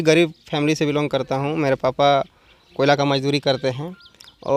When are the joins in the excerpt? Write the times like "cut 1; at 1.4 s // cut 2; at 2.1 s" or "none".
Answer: none